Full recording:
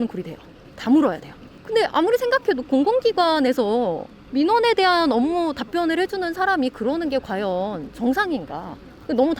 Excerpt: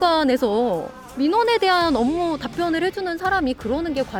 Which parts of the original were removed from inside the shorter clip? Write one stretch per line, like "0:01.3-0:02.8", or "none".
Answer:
none

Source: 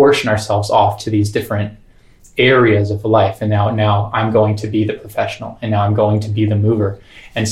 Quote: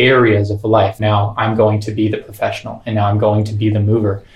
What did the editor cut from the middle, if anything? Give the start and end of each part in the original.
0:03.4-0:03.7

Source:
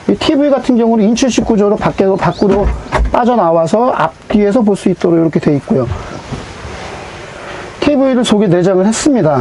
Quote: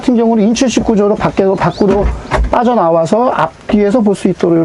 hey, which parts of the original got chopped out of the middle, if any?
none

